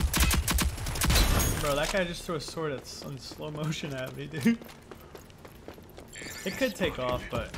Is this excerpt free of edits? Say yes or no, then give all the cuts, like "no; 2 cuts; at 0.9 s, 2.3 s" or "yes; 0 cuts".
yes; 0 cuts